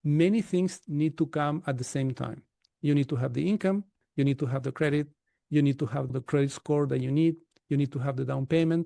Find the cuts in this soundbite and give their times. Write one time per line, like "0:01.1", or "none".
0:06.1